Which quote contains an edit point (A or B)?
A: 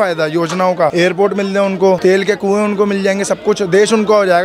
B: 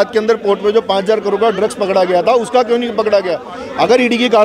A